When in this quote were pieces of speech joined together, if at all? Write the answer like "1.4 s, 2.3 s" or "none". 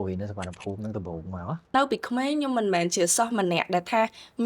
1.7 s